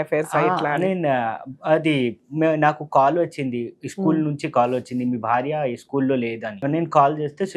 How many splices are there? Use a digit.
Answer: 1